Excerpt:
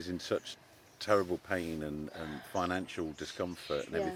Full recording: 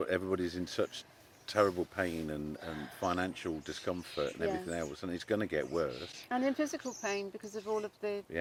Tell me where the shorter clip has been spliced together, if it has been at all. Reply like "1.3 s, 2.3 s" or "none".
none